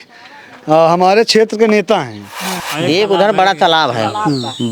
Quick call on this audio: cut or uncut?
cut